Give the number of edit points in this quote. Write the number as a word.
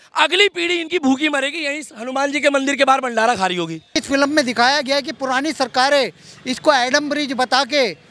one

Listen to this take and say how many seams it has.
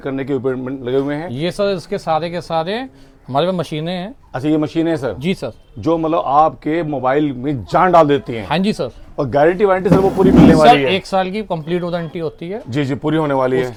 zero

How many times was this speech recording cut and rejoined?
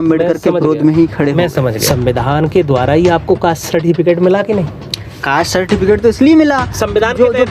one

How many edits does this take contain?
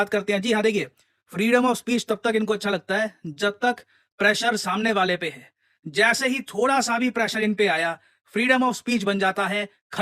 zero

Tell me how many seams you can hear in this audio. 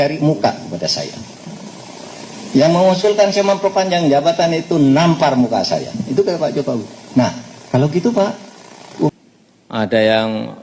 one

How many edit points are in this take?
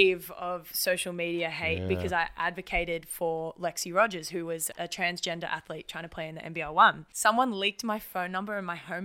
two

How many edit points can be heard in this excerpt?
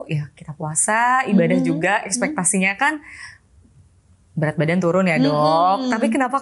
zero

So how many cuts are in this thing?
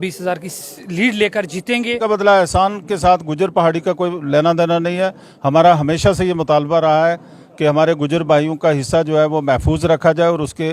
one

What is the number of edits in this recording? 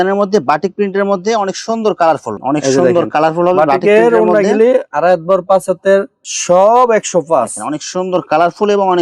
two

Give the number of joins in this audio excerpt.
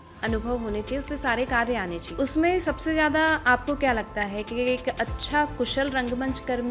one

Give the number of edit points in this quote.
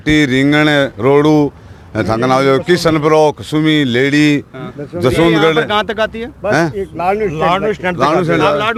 zero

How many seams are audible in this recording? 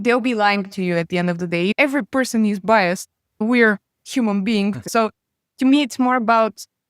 two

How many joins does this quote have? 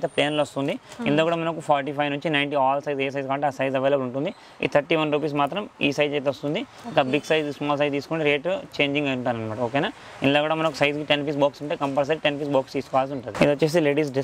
zero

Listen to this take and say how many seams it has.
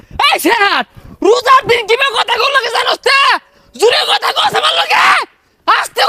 zero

